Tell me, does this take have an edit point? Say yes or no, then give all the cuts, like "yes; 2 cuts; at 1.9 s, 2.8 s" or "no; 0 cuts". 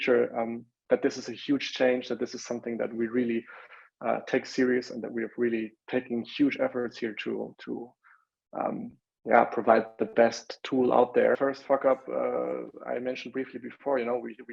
yes; 1 cut; at 11.4 s